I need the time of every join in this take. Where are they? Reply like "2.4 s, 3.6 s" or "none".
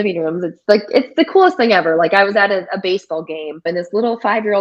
3.7 s